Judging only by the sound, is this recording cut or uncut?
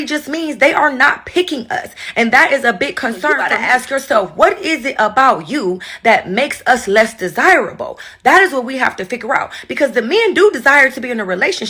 cut